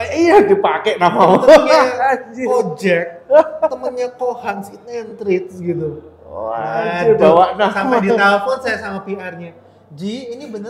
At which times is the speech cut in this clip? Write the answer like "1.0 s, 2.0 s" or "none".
none